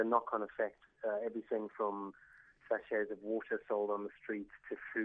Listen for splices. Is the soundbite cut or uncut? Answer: uncut